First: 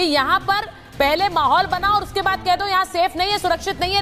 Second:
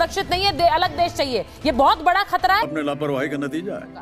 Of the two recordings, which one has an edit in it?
second; 1 cut; at 2.6 s

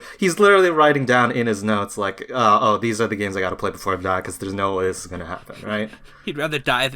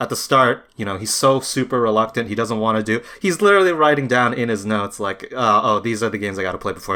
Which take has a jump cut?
first; 1 cut; at 6.1 s

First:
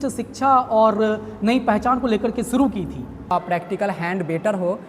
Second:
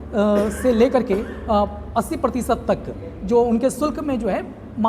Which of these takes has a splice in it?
first; 1 cut; at 3.3 s

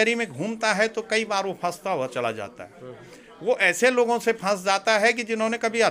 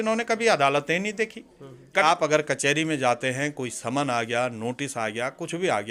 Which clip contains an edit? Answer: second; 1 cut; at 2.0 s

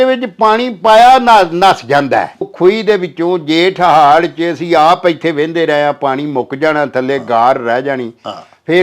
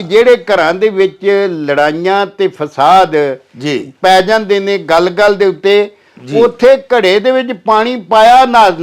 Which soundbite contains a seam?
first; 1 cut; at 2.5 s

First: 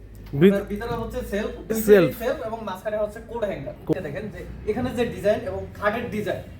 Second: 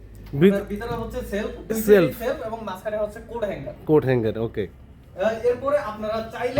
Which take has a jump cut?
first; 1 cut; at 3.9 s

